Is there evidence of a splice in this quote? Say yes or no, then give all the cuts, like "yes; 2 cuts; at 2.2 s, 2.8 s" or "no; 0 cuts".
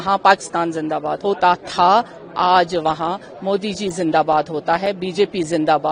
yes; 1 cut; at 1.1 s